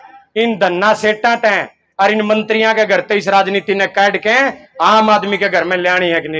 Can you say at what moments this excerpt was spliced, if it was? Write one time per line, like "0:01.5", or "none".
none